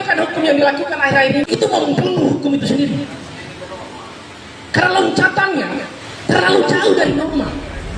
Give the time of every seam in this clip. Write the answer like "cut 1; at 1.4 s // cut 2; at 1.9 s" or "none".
cut 1; at 1.4 s